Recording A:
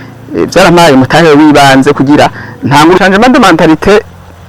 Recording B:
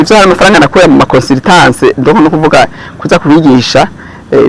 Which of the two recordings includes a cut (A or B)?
A